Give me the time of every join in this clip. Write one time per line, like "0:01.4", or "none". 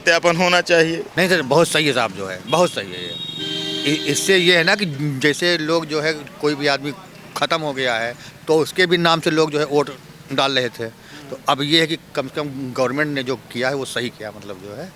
0:01.1